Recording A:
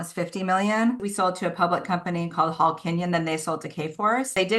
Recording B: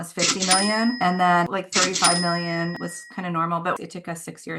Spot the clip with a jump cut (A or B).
A